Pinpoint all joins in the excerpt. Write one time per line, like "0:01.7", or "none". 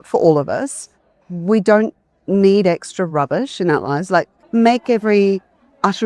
0:04.4

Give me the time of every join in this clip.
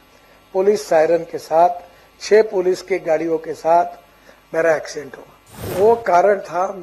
0:05.6

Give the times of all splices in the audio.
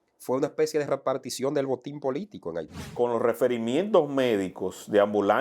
0:02.9

